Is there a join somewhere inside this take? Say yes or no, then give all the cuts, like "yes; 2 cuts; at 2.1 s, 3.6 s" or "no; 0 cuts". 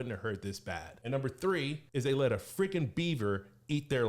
yes; 2 cuts; at 0.9 s, 1.8 s